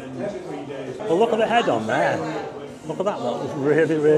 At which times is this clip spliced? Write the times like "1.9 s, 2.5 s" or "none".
1.0 s